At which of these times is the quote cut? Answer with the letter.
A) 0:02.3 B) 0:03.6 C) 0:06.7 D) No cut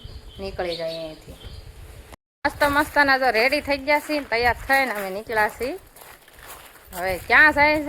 A